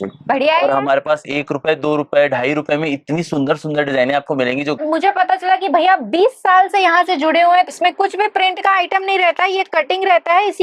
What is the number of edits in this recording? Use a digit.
2